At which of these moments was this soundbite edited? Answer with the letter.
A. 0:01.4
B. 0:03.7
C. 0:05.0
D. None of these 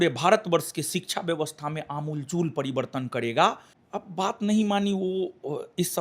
B